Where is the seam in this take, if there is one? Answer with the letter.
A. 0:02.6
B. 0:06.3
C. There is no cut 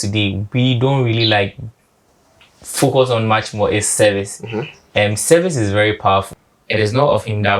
B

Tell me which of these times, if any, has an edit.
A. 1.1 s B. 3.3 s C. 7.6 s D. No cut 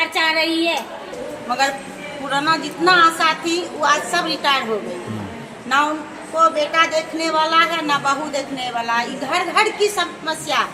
A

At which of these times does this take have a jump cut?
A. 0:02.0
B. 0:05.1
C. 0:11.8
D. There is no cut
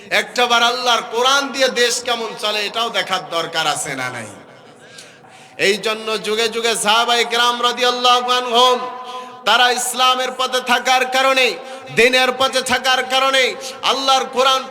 B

